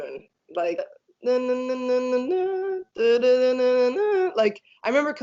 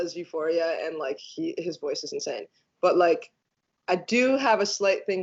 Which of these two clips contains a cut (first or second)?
first